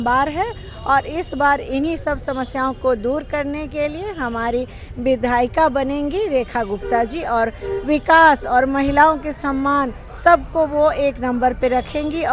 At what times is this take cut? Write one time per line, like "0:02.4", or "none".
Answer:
none